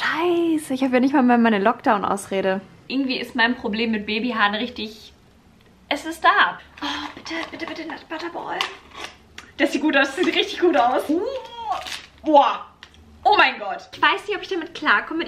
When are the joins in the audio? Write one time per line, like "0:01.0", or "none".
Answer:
0:02.9
0:06.6
0:11.1
0:13.9